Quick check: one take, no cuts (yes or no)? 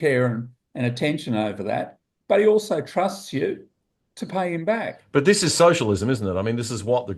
no